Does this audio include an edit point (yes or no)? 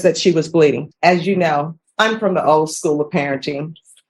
yes